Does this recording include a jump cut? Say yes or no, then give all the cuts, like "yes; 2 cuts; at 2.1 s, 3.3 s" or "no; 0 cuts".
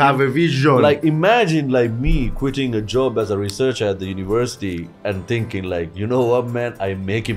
no; 0 cuts